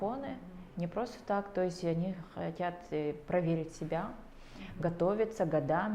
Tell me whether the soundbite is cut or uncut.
uncut